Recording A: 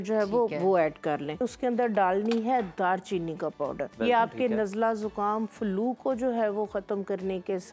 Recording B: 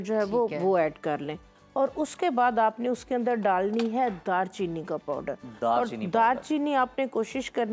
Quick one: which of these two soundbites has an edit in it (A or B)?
A